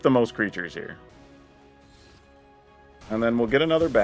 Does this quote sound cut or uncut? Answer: cut